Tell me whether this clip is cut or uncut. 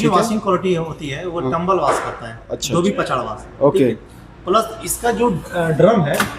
uncut